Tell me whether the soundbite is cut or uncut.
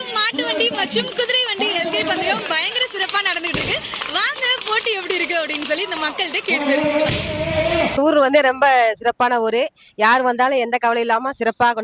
uncut